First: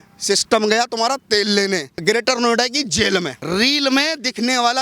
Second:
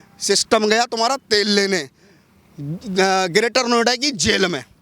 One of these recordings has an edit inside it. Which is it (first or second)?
first